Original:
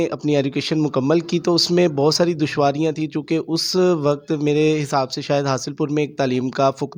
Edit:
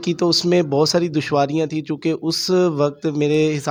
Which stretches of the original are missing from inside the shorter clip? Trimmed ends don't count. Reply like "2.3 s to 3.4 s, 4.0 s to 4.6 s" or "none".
none